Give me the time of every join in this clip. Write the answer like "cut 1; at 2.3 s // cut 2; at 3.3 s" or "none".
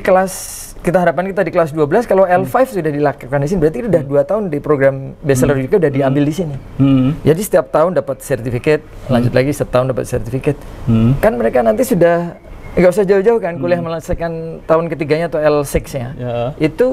none